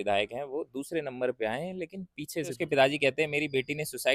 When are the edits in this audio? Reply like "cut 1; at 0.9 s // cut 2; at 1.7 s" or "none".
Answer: cut 1; at 2.6 s